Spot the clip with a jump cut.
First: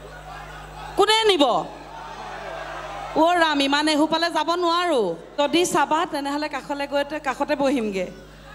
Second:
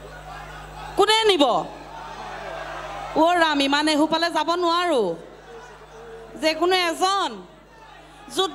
first; 1 cut; at 5.3 s

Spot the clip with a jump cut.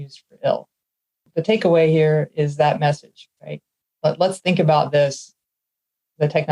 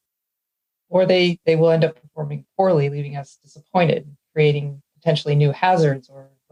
first; 1 cut; at 1.3 s

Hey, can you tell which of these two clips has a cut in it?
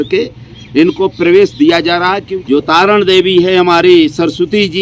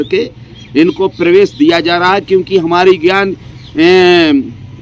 first; 1 cut; at 2.2 s

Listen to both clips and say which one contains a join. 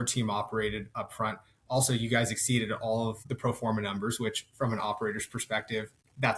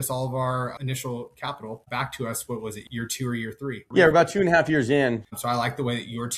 second; 3 cuts; at 0.8 s, 3.3 s, 5.3 s

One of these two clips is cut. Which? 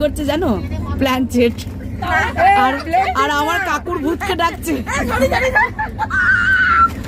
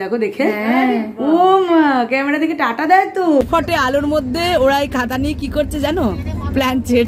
second; 1 cut; at 3.4 s

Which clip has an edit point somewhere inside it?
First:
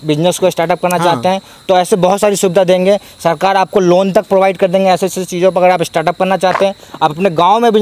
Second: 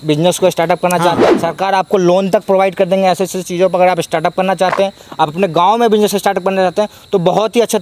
second; 1 cut; at 1.2 s

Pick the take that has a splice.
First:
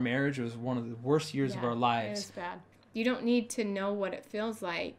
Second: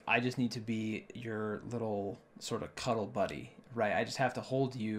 first; 1 cut; at 2.6 s

